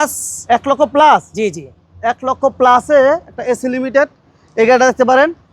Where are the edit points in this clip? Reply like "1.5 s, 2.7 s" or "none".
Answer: none